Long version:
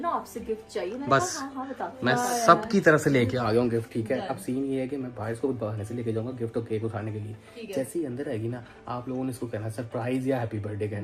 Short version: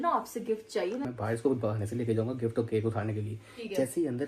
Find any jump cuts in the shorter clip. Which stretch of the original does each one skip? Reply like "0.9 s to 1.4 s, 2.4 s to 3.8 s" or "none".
1.0 s to 5.0 s